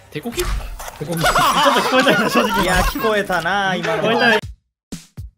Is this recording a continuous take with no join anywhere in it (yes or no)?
no